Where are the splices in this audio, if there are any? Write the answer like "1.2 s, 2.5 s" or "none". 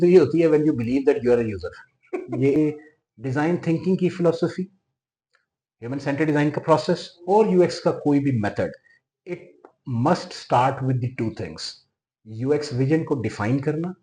2.6 s